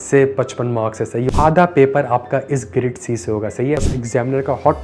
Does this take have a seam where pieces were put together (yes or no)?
yes